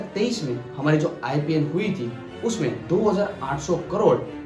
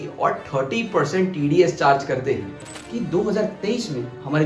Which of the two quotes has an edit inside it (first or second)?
second